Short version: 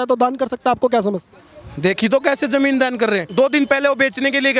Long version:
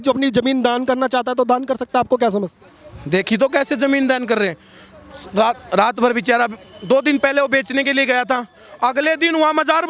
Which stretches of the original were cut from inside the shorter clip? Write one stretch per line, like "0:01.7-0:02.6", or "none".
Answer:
0:04.6-0:06.8